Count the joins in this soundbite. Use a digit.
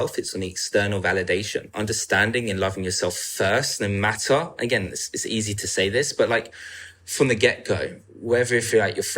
1